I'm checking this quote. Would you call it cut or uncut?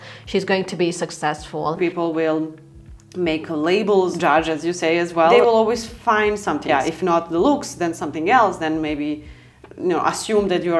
cut